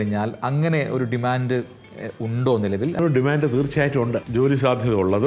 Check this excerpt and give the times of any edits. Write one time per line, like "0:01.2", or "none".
0:03.0
0:04.3